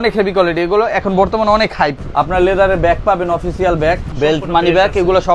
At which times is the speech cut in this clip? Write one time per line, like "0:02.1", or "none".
0:02.0
0:04.1

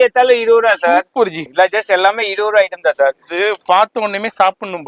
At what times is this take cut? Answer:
0:01.4

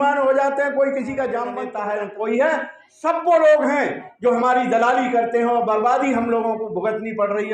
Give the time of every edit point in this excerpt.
0:01.6

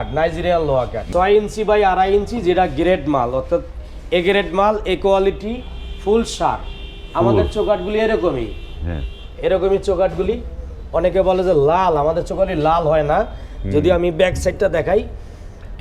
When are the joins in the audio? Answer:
0:01.1

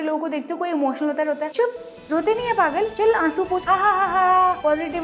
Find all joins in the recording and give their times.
none

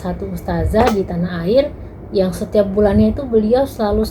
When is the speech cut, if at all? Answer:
none

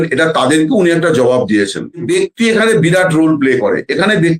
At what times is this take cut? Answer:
0:02.0

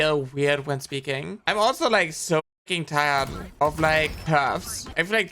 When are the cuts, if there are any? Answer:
0:01.4
0:04.2

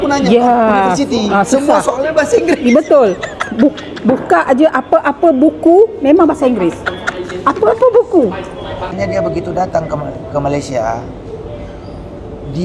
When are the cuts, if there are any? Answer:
0:08.9

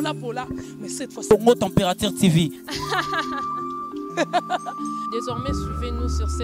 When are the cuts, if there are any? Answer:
none

